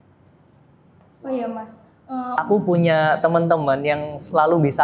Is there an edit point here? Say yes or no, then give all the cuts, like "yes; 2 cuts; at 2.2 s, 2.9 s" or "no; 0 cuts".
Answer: yes; 1 cut; at 2.4 s